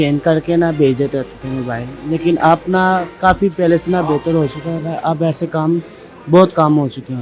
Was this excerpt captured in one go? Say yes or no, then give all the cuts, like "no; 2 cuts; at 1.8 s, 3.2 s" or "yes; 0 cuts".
yes; 0 cuts